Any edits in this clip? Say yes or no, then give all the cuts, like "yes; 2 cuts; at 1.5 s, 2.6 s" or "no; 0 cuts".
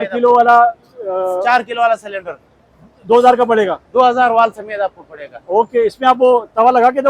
no; 0 cuts